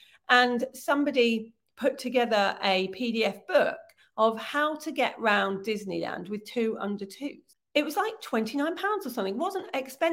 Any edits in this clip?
yes; 1 cut; at 7.5 s

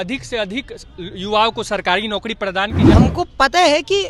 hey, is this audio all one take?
no; 1 cut; at 2.9 s

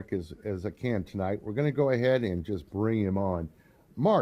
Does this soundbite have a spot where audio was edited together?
no; 0 cuts

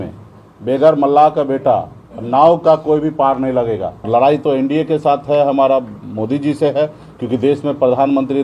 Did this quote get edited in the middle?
yes; 1 cut; at 4.1 s

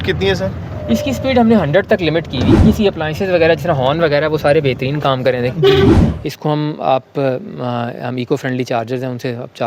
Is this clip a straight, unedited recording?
no; 2 cuts; at 2.6 s, 6.0 s

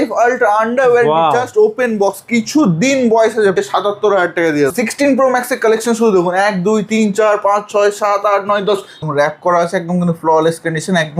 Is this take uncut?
no; 3 cuts; at 3.6 s, 4.7 s, 8.9 s

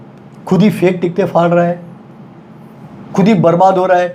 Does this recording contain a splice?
no; 0 cuts

